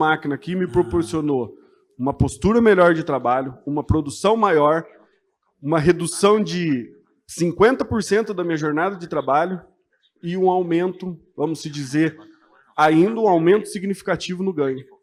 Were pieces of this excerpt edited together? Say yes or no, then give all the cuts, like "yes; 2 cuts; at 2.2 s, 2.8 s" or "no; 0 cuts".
no; 0 cuts